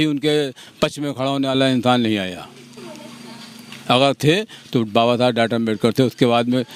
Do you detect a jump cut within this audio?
no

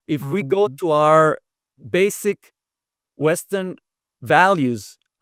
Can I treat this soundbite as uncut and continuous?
yes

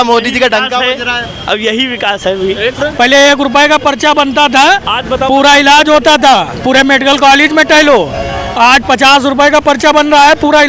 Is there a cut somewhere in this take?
yes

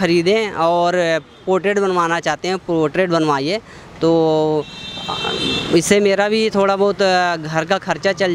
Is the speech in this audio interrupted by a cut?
no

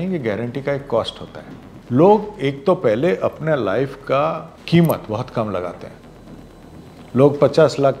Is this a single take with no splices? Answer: no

